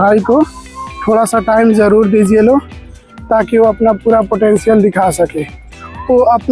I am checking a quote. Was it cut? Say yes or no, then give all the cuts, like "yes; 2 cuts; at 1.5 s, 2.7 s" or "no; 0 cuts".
no; 0 cuts